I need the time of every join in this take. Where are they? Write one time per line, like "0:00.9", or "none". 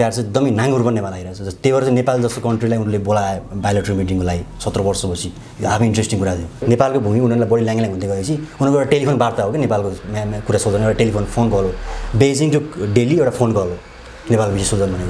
0:06.6